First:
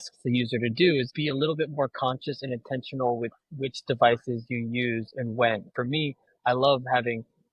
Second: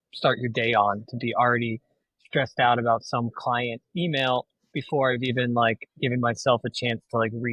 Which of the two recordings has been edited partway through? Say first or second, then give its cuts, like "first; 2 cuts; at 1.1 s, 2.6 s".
first; 2 cuts; at 1.1 s, 5.7 s